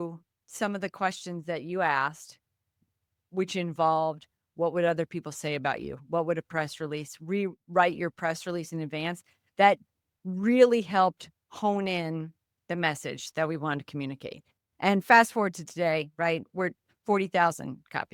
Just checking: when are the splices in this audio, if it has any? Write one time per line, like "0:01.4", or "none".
none

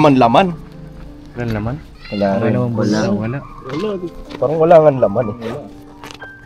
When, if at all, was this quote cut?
0:02.0

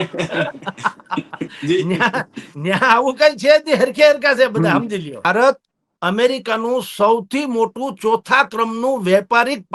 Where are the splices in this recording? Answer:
0:05.3

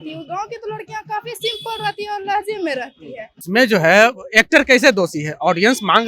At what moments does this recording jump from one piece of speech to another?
0:03.4

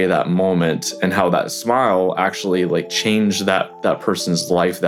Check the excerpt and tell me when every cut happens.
none

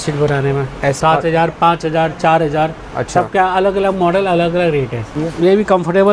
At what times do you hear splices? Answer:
0:01.0
0:05.0

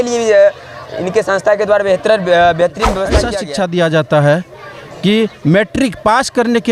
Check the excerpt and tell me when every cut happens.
0:03.2

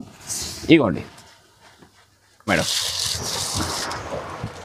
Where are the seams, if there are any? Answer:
0:02.5

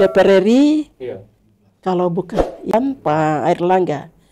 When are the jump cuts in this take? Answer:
0:02.7

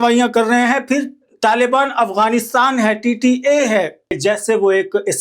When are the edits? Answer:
0:04.2

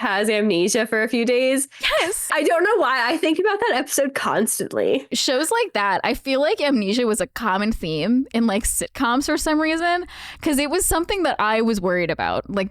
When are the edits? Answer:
0:02.3
0:05.1

